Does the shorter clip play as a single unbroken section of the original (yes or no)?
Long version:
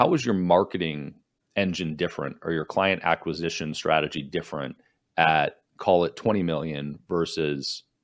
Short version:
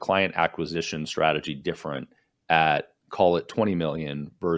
yes